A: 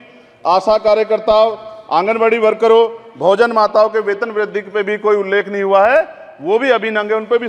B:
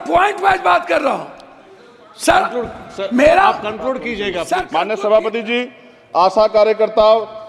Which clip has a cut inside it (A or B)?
B